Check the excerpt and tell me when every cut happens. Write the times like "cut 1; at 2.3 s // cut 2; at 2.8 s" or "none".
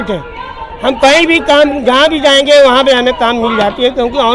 none